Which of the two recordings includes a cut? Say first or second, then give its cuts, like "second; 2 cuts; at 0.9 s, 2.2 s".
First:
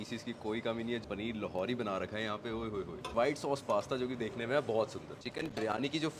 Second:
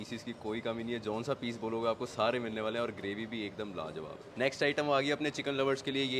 first; 3 cuts; at 1.0 s, 3.1 s, 5.2 s